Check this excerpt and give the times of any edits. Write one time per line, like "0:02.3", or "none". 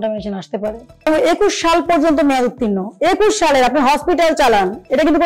0:01.1